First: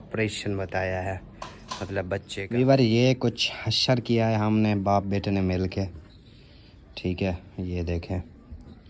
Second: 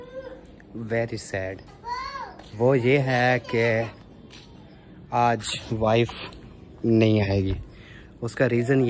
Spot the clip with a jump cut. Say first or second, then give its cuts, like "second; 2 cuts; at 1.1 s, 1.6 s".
first; 1 cut; at 2.5 s